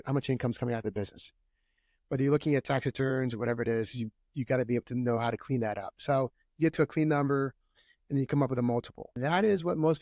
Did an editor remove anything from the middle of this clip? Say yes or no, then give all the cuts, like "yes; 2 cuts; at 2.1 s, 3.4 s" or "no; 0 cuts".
yes; 1 cut; at 9.0 s